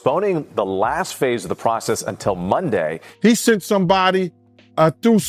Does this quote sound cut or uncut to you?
cut